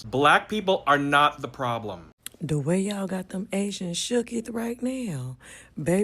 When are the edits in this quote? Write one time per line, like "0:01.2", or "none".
0:02.1